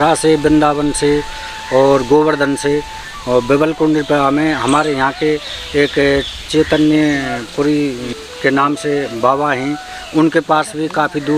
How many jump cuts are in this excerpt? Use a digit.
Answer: 1